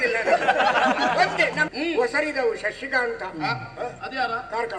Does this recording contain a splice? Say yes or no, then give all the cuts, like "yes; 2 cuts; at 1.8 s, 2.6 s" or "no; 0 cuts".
yes; 1 cut; at 1.7 s